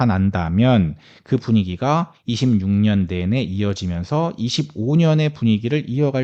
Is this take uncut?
yes; 0 cuts

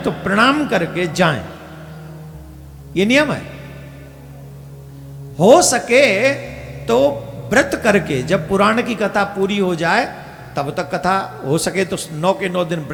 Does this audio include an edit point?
no; 0 cuts

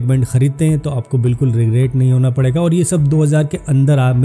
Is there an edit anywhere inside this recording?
no; 0 cuts

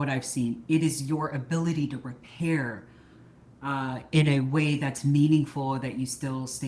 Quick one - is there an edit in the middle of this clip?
no; 0 cuts

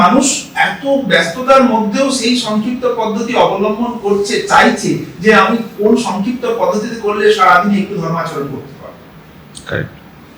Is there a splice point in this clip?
no; 0 cuts

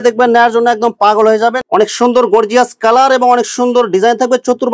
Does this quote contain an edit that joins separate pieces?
yes; 1 cut; at 1.6 s

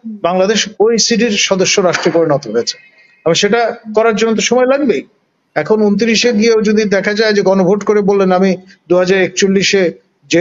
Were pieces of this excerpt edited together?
no; 0 cuts

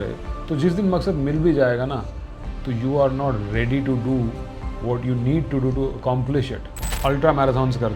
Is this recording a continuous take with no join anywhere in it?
no; 1 cut; at 6.6 s

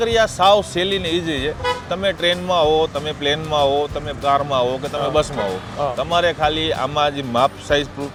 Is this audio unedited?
yes; 0 cuts

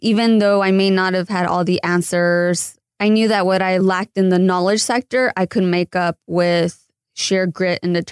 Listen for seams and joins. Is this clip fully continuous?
no; 2 cuts; at 2.7 s, 3.8 s

